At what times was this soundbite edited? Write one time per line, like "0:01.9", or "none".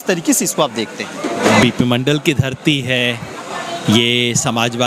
0:01.5